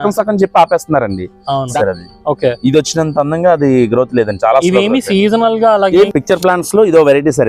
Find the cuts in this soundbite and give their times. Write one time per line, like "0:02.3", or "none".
0:01.7
0:06.1